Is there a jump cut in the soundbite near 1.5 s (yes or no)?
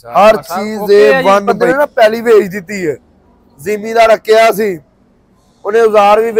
yes